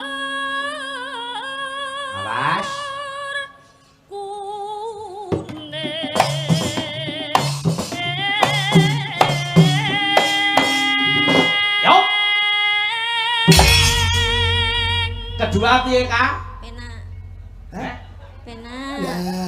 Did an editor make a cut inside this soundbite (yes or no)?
no